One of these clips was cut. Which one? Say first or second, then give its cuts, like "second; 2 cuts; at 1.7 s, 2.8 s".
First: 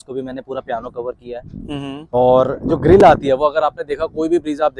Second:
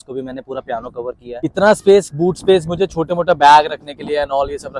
second; 1 cut; at 1.4 s